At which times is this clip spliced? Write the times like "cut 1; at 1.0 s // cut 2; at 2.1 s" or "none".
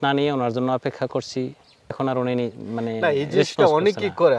cut 1; at 1.9 s